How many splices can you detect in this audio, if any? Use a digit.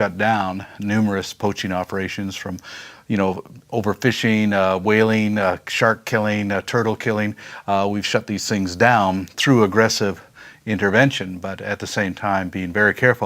1